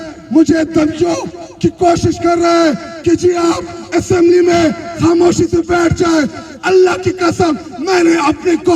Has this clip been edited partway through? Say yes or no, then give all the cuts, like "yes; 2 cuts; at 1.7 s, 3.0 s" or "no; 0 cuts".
no; 0 cuts